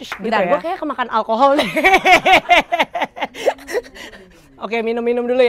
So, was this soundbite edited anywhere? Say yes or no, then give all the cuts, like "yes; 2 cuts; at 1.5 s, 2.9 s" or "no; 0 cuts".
no; 0 cuts